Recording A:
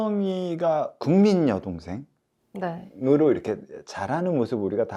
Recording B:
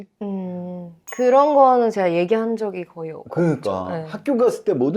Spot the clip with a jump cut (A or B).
A